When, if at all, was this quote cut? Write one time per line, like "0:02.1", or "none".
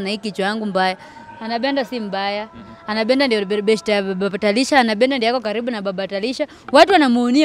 none